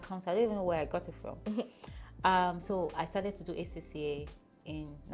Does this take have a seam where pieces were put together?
no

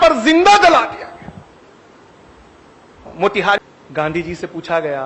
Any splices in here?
yes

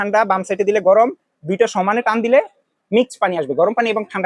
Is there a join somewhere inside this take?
no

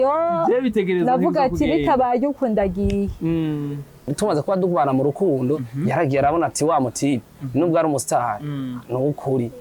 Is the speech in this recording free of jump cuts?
no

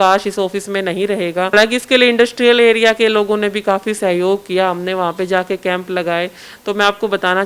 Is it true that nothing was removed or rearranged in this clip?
no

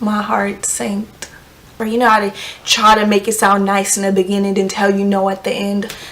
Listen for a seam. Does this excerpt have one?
yes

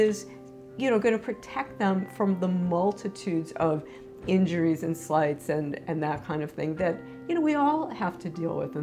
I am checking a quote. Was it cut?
no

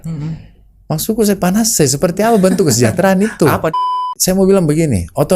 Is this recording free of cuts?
no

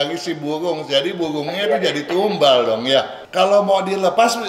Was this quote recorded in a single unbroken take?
no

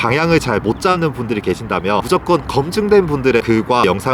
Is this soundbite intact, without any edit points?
yes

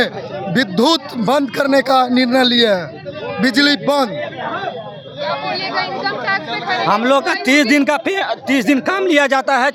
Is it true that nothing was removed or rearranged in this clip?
yes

